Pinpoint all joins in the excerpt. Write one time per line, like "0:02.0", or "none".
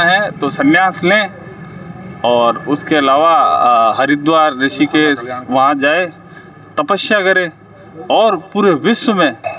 none